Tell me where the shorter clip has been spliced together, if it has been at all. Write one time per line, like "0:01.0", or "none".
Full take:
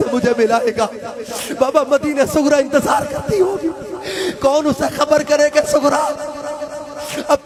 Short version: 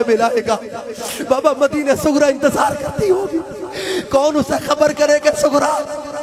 none